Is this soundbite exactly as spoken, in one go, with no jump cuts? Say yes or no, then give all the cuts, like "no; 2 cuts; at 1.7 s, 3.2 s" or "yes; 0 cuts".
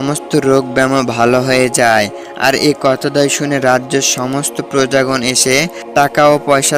yes; 0 cuts